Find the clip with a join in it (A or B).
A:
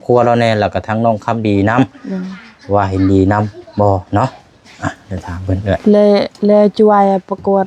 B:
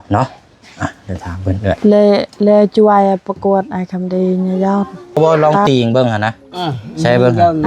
B